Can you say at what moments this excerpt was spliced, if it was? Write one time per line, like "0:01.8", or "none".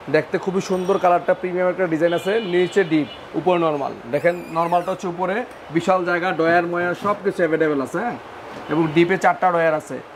none